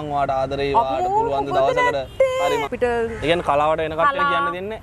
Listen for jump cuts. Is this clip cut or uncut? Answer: cut